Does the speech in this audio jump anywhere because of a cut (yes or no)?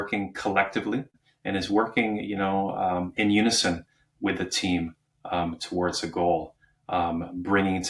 yes